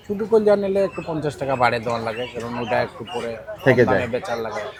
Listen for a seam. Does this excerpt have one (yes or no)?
no